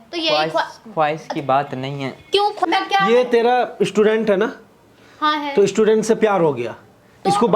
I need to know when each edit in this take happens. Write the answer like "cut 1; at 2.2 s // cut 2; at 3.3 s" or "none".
cut 1; at 2.6 s